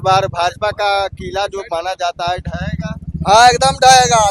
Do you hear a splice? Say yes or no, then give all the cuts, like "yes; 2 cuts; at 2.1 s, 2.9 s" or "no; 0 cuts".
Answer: no; 0 cuts